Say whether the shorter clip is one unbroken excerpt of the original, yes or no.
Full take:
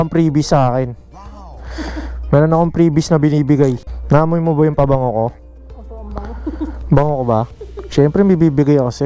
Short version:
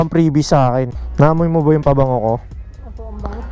no